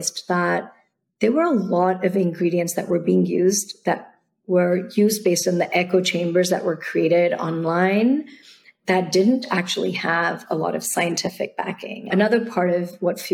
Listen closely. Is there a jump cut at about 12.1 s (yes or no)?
yes